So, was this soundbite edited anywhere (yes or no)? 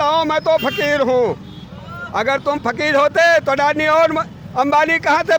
no